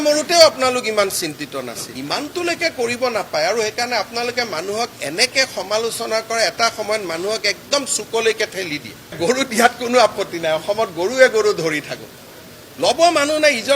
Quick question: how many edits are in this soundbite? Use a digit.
2